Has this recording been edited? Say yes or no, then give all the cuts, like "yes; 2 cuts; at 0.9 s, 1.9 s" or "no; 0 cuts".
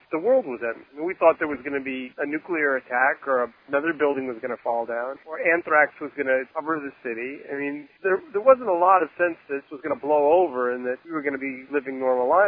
no; 0 cuts